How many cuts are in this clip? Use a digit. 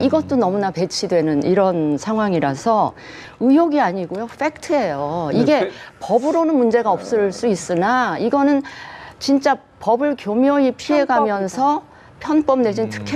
1